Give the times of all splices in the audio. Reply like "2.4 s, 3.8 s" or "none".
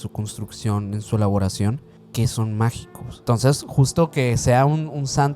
1.9 s, 3.2 s